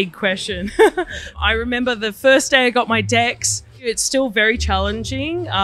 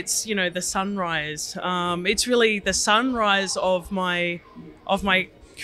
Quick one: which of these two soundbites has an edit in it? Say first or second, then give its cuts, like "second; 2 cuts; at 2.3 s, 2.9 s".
first; 2 cuts; at 1.3 s, 3.7 s